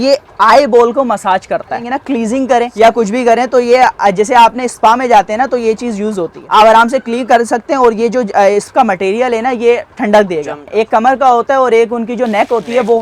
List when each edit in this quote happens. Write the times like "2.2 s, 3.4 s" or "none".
1.9 s, 2.7 s, 6.4 s, 10.6 s